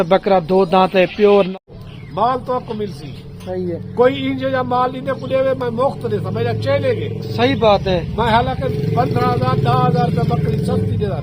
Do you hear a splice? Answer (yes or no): yes